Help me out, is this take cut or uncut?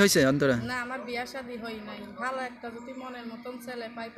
uncut